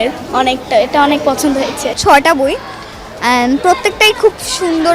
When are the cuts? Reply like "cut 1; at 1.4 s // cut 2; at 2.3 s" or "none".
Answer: cut 1; at 2.0 s